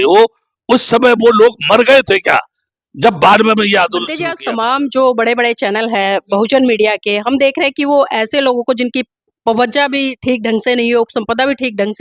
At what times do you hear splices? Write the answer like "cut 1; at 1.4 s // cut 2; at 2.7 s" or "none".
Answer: cut 1; at 4.3 s